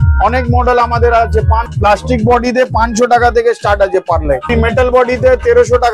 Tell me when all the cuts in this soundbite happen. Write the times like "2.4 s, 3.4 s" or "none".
1.7 s, 4.4 s